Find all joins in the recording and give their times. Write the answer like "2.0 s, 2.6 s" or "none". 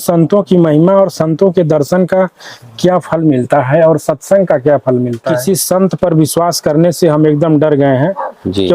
5.4 s